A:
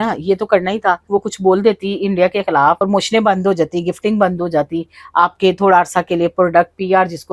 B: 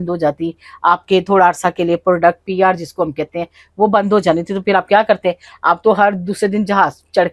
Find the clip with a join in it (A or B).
A